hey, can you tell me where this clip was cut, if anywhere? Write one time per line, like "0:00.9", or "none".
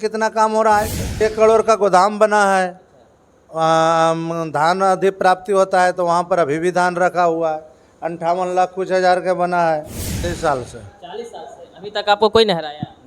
0:01.1
0:10.0